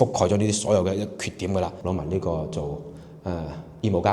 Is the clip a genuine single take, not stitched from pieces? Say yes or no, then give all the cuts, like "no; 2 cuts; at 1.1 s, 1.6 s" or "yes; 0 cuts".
no; 1 cut; at 1.8 s